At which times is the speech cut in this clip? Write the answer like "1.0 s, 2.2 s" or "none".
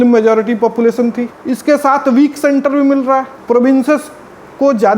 1.3 s, 3.3 s